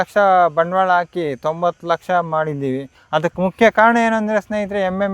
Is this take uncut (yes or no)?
no